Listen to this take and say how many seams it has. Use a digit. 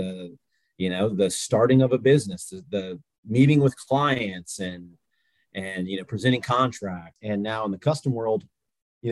1